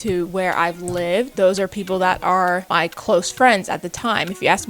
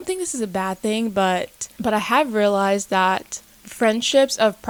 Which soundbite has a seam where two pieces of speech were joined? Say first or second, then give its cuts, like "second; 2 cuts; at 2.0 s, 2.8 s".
first; 2 cuts; at 1.3 s, 2.7 s